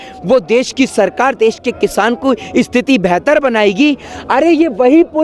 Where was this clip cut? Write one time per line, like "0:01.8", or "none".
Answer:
none